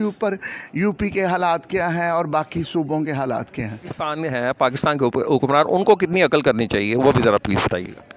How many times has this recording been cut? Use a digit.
1